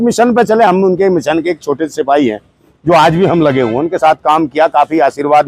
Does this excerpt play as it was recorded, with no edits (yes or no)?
yes